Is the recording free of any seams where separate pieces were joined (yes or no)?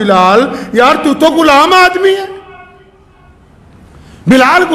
yes